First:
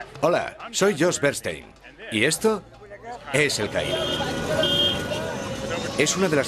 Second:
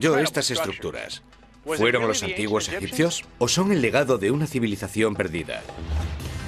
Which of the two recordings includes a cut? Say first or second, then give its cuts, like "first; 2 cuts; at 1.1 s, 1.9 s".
first; 1 cut; at 3.2 s